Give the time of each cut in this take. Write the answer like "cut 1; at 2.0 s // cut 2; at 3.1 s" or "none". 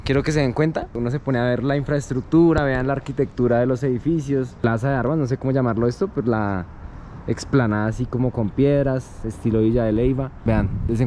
none